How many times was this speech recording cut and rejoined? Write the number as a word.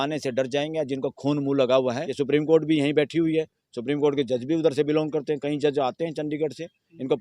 one